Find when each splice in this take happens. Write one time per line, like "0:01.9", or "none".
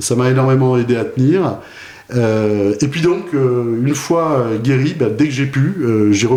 none